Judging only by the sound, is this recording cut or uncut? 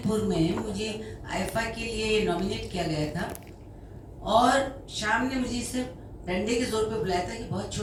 uncut